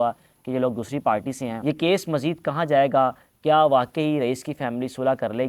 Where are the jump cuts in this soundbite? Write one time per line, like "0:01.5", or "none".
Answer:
0:01.5